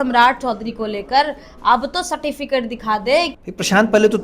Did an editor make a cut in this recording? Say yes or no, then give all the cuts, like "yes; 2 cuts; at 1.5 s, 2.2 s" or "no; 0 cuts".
yes; 1 cut; at 3.3 s